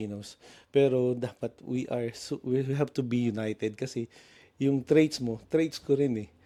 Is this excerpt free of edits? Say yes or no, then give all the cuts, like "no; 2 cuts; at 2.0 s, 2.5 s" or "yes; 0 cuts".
yes; 0 cuts